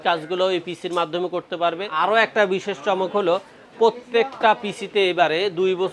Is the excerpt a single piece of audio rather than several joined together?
no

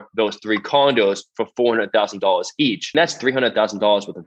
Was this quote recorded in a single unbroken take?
no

